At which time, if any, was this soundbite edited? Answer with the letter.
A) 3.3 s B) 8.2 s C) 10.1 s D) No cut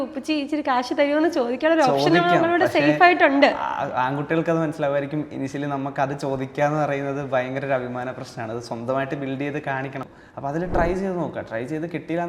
C